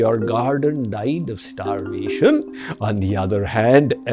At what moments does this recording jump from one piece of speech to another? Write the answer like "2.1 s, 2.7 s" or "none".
2.6 s